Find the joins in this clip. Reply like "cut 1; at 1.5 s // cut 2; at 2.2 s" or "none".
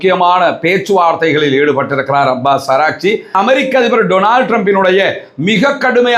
cut 1; at 3.3 s